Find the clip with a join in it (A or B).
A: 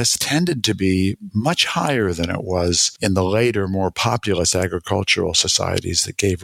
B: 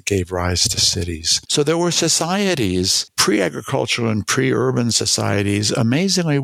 B